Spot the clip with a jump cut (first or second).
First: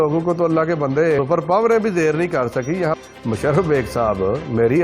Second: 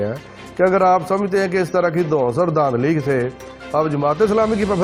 first